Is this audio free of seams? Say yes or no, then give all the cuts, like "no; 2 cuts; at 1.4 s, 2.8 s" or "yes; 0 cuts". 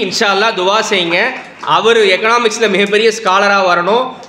yes; 0 cuts